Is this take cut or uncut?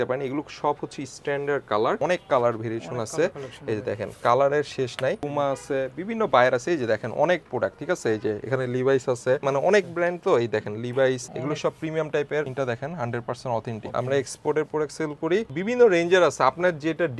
cut